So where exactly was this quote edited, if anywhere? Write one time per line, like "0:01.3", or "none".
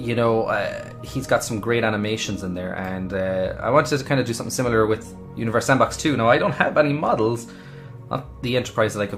none